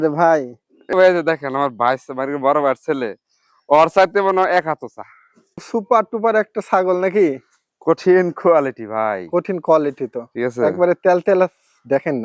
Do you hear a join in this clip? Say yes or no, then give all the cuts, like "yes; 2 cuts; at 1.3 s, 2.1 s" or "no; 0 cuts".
yes; 2 cuts; at 0.9 s, 5.7 s